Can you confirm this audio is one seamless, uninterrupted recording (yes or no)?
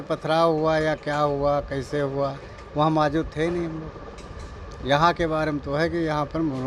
yes